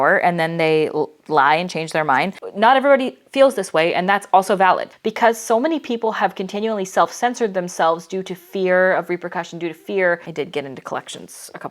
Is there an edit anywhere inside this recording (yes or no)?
yes